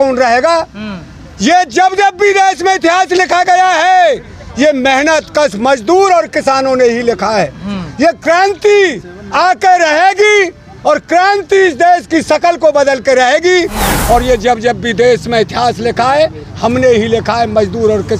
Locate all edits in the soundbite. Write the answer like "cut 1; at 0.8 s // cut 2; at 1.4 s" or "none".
cut 1; at 13.9 s